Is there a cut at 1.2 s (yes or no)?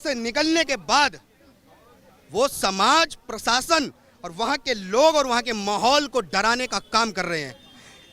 no